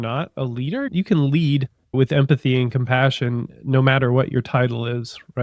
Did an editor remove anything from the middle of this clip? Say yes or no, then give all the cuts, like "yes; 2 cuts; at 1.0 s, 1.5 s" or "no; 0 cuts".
yes; 1 cut; at 1.9 s